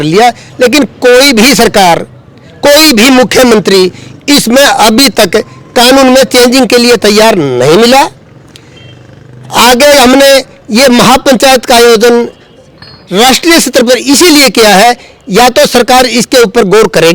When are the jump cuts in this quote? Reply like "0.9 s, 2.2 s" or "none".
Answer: none